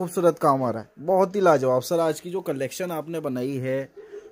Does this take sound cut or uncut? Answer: uncut